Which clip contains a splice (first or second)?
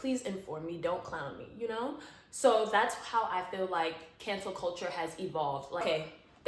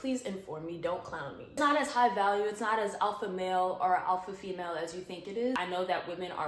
second